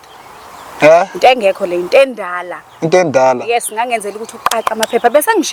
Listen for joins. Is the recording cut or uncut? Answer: uncut